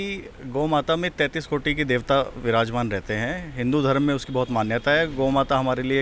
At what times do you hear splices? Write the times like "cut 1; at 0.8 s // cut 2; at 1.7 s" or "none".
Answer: none